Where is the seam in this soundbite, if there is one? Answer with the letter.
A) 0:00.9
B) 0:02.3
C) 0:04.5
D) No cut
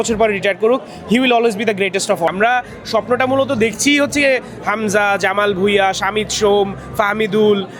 B